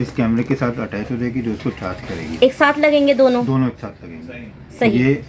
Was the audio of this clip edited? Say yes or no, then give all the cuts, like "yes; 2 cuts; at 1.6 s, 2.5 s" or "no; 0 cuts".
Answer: no; 0 cuts